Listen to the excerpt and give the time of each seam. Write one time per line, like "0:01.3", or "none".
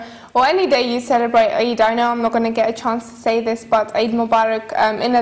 0:04.2